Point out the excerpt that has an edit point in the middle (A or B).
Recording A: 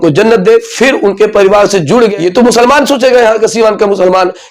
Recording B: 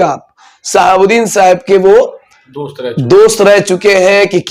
A